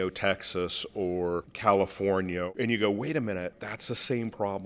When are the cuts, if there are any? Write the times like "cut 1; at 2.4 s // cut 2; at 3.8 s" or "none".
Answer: cut 1; at 1.5 s // cut 2; at 2.5 s // cut 3; at 3.5 s